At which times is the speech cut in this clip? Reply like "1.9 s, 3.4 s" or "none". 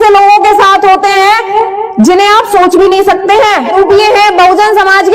3.7 s